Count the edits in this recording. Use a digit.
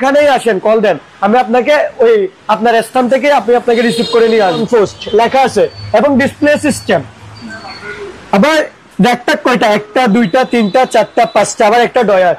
1